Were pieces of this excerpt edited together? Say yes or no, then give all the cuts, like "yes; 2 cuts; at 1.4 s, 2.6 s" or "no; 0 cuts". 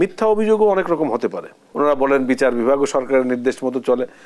yes; 1 cut; at 1.6 s